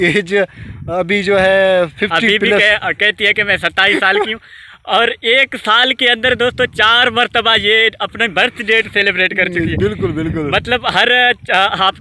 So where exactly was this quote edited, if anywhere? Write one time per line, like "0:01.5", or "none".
none